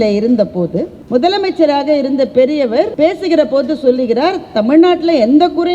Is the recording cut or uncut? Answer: cut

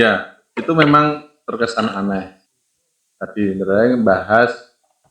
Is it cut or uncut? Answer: cut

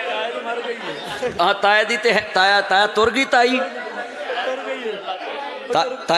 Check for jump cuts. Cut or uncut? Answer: uncut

